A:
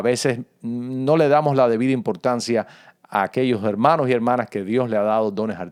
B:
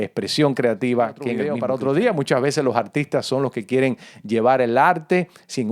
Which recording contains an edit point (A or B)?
B